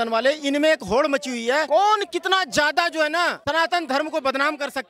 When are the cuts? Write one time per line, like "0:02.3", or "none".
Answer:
none